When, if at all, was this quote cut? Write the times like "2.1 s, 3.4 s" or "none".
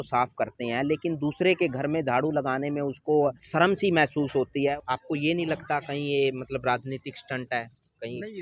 3.4 s, 4.7 s

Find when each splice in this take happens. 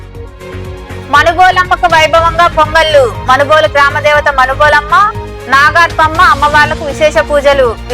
1.1 s

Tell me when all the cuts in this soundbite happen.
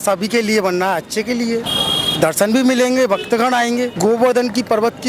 3.9 s

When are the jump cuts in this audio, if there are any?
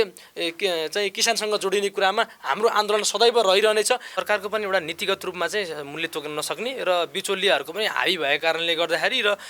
4.1 s

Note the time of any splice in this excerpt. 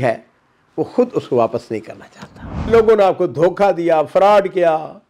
2.7 s

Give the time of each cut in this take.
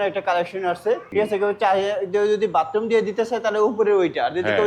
1.1 s

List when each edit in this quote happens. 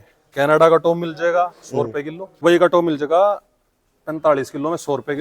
2.4 s

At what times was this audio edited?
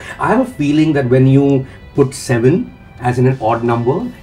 none

